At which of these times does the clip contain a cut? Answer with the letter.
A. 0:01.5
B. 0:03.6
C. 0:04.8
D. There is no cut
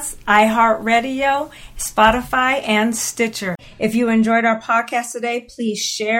B